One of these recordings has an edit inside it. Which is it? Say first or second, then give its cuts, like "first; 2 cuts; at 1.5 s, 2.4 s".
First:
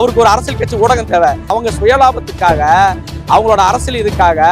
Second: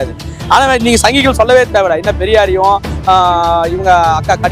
first; 1 cut; at 1.5 s